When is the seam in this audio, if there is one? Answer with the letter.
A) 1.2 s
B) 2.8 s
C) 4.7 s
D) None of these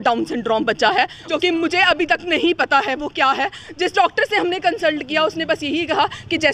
A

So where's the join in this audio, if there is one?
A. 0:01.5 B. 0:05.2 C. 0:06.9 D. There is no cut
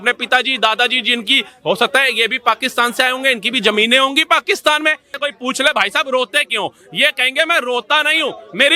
B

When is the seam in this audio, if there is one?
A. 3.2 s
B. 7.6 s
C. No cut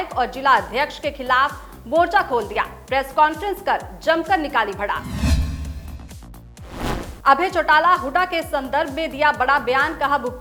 C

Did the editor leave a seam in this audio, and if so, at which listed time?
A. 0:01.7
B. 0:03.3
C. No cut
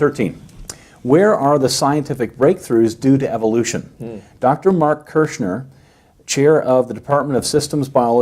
B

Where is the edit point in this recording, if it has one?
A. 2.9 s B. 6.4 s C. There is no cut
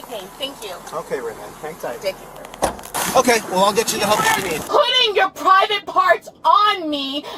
A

